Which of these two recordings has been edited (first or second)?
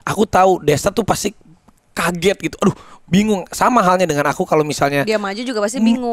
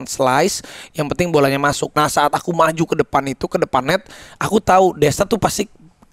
second